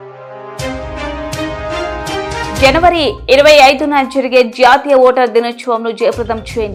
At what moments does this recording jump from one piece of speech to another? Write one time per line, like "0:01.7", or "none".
none